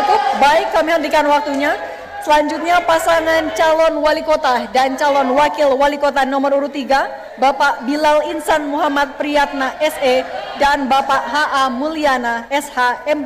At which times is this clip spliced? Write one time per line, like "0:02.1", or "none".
none